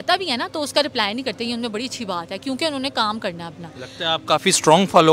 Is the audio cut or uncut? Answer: uncut